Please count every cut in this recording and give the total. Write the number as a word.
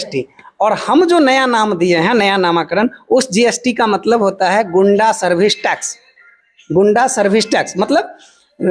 zero